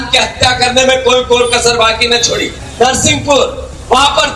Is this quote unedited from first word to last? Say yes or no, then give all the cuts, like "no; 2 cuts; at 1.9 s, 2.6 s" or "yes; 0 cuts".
no; 1 cut; at 2.6 s